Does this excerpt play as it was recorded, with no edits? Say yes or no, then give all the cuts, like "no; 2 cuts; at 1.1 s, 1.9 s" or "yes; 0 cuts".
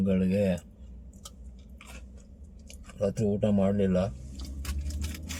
yes; 0 cuts